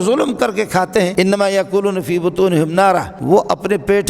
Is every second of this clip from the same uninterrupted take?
no; 2 cuts; at 1.1 s, 3.1 s

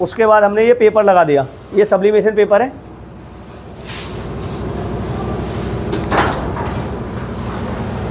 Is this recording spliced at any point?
no; 0 cuts

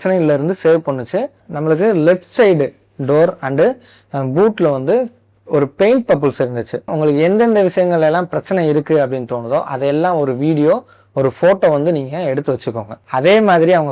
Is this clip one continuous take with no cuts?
no; 3 cuts; at 1.4 s, 6.9 s, 13.0 s

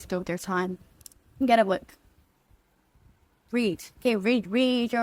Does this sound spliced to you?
no; 0 cuts

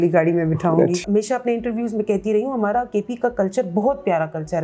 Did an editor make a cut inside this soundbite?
yes; 1 cut; at 1.0 s

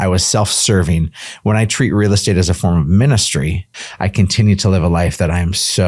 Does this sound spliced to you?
yes; 1 cut; at 3.7 s

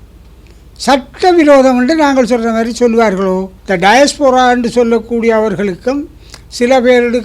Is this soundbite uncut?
no; 1 cut; at 3.5 s

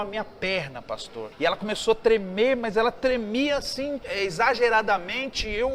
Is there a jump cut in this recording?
yes; 2 cuts; at 1.2 s, 4.0 s

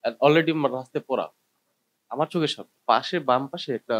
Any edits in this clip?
yes; 1 cut; at 2.7 s

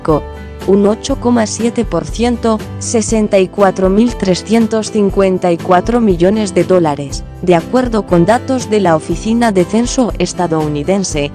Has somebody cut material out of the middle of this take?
yes; 1 cut; at 10.1 s

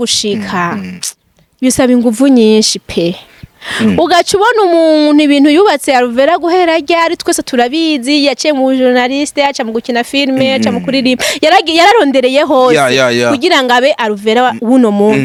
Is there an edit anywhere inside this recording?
no; 0 cuts

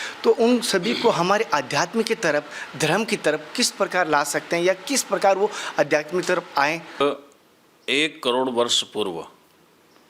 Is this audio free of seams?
no; 1 cut; at 7.0 s

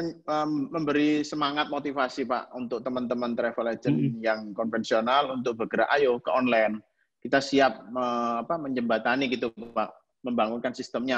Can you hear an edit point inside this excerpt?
no; 0 cuts

